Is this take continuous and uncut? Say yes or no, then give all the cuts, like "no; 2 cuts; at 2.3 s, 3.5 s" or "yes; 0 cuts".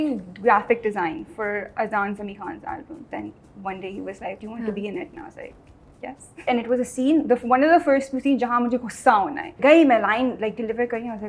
no; 4 cuts; at 3.1 s, 4.4 s, 6.5 s, 9.5 s